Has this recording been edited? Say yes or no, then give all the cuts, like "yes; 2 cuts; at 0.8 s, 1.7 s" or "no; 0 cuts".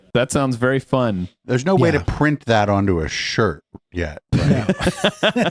no; 0 cuts